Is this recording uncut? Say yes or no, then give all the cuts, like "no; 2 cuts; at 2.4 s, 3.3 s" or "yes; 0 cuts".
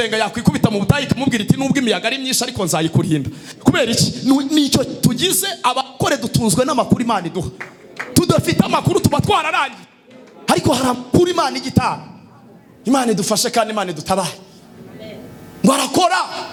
yes; 0 cuts